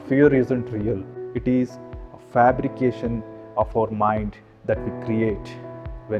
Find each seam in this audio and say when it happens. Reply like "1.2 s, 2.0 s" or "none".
1.1 s